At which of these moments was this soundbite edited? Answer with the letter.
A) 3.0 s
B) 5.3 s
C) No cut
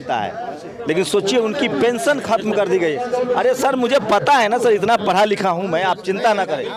C